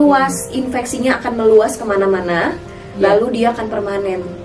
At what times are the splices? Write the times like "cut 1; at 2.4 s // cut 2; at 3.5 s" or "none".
none